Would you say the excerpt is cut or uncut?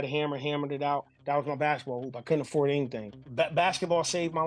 cut